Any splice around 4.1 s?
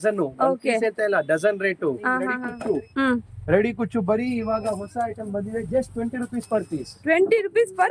no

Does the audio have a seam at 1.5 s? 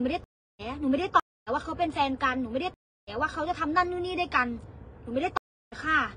no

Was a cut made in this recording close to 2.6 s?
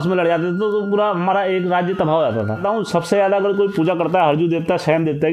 yes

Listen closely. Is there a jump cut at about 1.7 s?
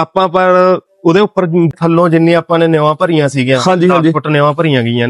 yes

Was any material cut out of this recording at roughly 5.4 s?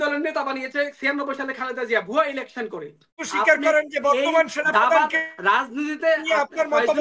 no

